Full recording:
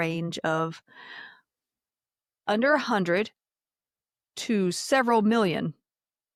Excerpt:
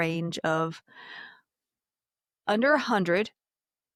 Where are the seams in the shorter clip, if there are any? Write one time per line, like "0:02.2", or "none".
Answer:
none